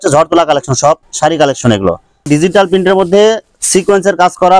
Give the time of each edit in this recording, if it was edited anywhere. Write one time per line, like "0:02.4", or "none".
0:02.1